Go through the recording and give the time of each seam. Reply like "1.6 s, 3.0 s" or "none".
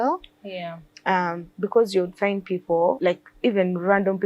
3.0 s